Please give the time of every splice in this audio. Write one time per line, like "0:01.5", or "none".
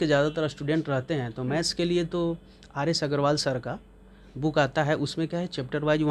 none